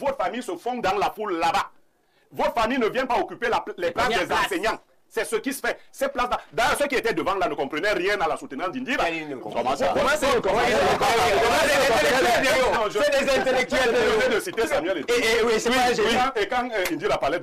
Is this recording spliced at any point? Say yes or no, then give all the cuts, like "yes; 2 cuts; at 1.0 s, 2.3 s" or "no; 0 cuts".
no; 0 cuts